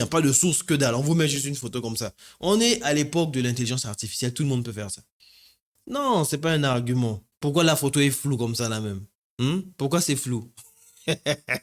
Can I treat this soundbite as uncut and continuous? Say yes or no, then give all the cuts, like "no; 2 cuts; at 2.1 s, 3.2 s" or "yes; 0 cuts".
no; 1 cut; at 7.3 s